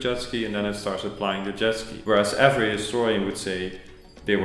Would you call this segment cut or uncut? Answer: cut